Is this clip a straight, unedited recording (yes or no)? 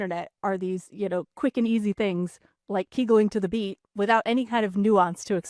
yes